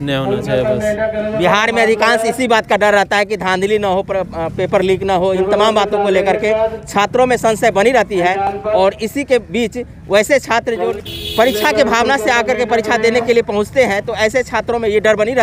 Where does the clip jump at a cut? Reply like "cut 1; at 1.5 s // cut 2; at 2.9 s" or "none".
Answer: none